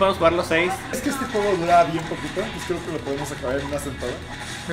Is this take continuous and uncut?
no; 1 cut; at 1.0 s

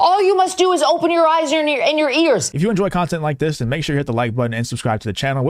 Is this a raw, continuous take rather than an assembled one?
no; 1 cut; at 2.5 s

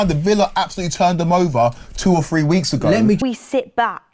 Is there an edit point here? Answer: yes; 1 cut; at 3.2 s

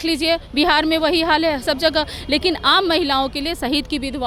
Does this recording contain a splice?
no; 0 cuts

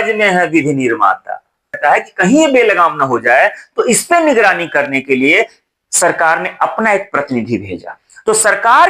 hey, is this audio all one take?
no; 1 cut; at 1.8 s

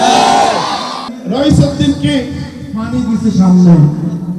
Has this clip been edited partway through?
yes; 1 cut; at 1.1 s

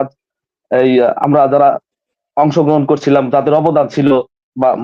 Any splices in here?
no; 0 cuts

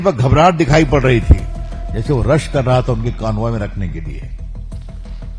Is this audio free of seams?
no; 1 cut; at 4.2 s

